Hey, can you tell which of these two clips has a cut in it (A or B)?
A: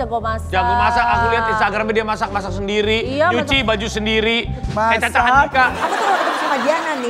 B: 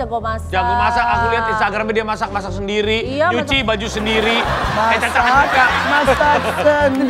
A